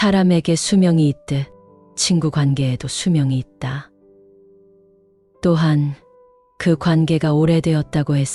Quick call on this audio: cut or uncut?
uncut